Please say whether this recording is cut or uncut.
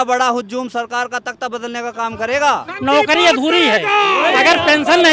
cut